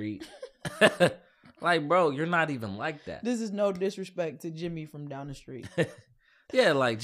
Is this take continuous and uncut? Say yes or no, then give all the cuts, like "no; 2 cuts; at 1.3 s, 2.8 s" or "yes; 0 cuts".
yes; 0 cuts